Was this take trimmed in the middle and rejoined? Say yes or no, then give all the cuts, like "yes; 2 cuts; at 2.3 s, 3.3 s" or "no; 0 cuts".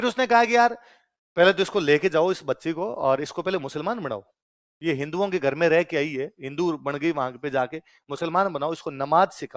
no; 0 cuts